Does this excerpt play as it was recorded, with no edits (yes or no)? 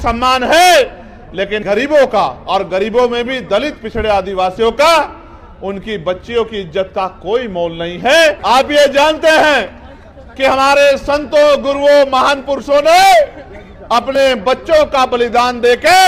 no